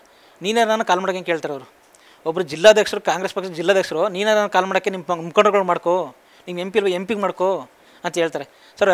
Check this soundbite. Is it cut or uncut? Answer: uncut